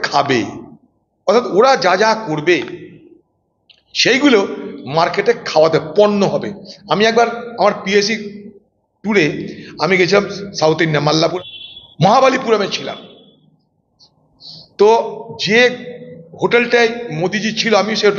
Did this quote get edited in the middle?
yes; 1 cut; at 11.3 s

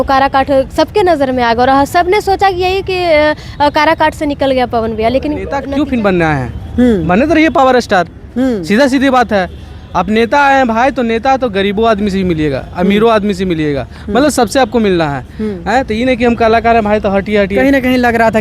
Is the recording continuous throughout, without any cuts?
no; 1 cut; at 5.6 s

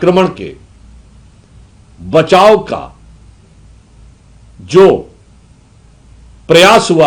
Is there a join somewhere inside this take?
no; 0 cuts

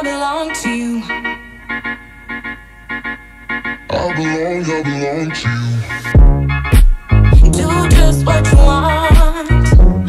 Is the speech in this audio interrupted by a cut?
no; 0 cuts

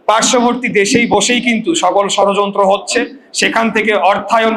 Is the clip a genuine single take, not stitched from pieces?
yes; 0 cuts

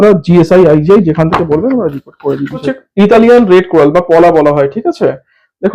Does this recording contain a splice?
yes; 1 cut; at 2.7 s

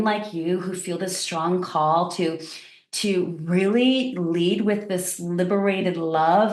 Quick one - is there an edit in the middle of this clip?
no; 0 cuts

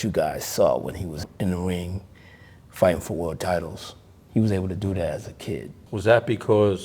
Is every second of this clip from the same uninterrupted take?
no; 2 cuts; at 1.2 s, 5.8 s

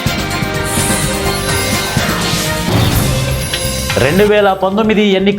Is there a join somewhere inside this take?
no; 0 cuts

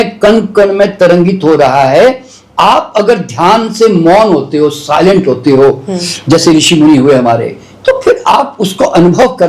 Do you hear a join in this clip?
no; 0 cuts

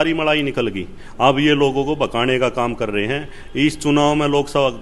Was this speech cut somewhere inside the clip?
no; 0 cuts

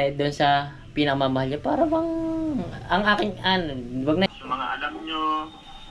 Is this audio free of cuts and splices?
no; 1 cut; at 4.3 s

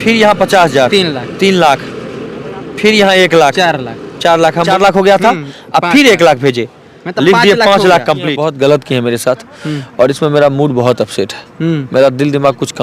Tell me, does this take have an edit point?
yes; 2 cuts; at 4.7 s, 8.3 s

